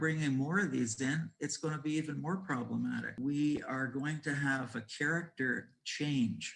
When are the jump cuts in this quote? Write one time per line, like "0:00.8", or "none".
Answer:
0:03.1